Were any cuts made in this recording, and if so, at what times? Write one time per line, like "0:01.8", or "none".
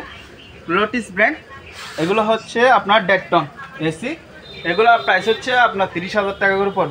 none